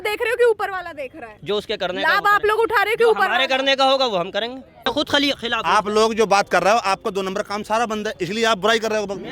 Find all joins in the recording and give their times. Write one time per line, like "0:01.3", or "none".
0:04.9